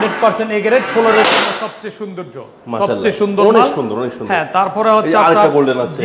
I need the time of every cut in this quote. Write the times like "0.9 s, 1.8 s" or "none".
none